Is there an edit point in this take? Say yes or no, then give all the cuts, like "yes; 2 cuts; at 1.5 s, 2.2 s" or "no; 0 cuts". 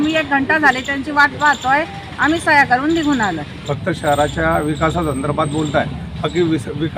yes; 1 cut; at 3.5 s